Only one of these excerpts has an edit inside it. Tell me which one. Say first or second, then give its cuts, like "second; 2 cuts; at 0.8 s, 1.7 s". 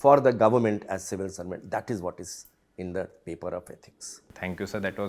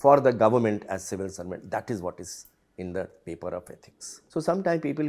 second; 1 cut; at 4.1 s